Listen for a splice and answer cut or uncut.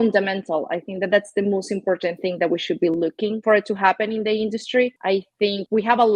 cut